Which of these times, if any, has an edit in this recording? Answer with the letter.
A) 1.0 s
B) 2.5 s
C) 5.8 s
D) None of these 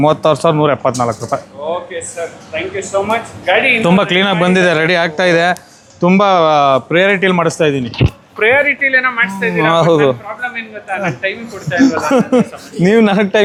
D